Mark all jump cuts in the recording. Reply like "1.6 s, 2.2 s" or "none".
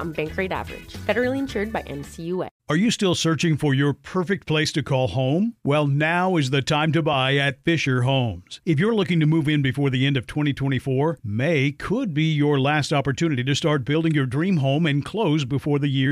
2.6 s